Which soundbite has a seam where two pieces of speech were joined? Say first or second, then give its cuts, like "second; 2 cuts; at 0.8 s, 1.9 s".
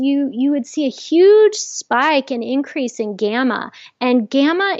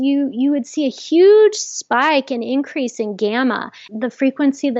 second; 1 cut; at 3.8 s